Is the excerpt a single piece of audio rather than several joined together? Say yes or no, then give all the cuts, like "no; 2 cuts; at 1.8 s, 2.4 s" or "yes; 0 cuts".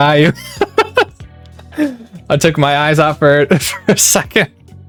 yes; 0 cuts